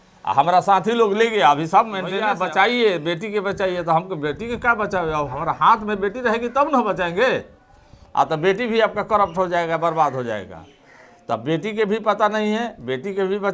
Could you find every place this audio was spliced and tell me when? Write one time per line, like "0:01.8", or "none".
0:02.2

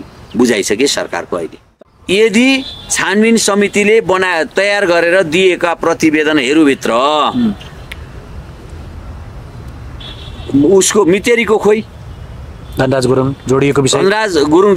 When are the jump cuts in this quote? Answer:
0:01.6

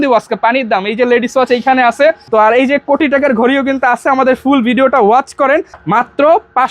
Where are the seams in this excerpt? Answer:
0:02.2
0:05.8

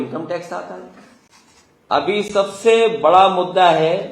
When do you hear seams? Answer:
0:01.8

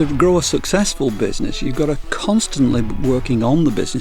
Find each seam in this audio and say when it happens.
0:02.1

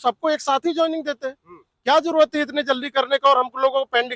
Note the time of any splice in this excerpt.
none

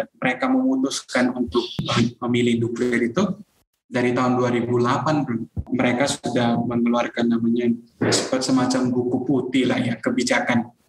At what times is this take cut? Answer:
0:01.8
0:05.6

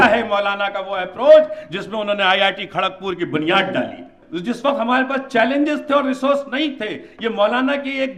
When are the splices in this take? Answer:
none

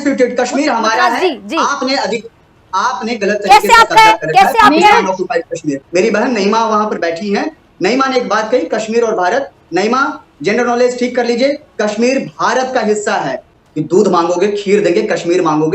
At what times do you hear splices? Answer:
0:05.8
0:13.5

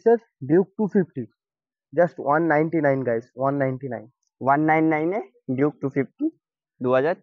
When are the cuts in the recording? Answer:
none

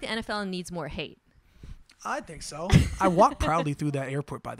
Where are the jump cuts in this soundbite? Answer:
0:02.9

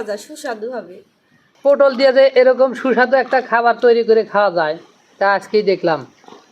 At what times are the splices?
0:01.6

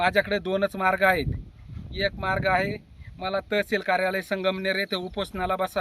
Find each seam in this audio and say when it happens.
none

